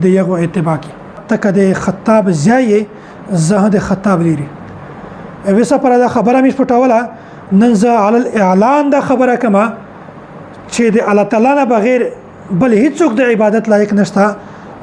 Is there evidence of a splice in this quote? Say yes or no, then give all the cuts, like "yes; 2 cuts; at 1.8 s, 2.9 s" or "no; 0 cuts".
yes; 1 cut; at 1.2 s